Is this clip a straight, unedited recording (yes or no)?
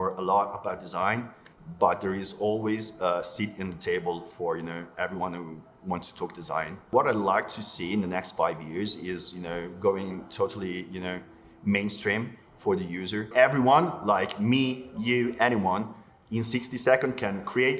no